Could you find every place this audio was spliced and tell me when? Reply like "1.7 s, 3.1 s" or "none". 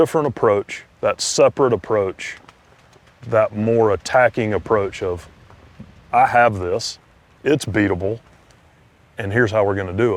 none